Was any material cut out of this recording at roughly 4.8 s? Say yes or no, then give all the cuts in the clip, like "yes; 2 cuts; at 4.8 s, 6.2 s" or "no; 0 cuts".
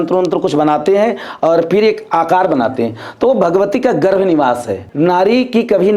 yes; 1 cut; at 4.8 s